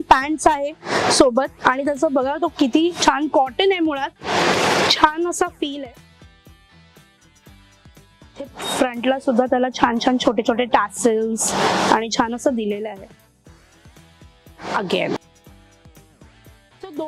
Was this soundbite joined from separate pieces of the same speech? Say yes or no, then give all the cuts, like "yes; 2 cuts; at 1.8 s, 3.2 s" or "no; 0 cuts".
no; 0 cuts